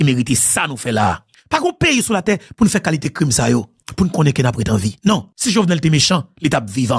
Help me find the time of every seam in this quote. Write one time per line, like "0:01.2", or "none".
0:05.3